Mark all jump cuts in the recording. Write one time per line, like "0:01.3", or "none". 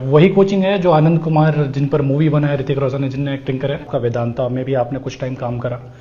0:03.9